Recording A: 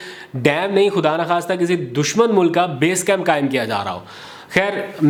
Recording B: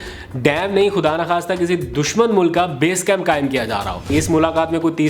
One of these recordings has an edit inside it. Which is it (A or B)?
B